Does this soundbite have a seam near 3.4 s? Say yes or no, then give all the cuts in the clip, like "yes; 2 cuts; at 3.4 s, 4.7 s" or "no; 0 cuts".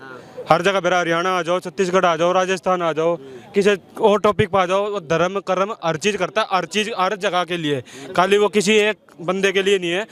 no; 0 cuts